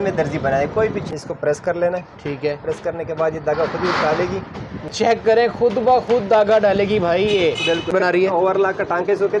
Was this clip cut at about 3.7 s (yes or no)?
no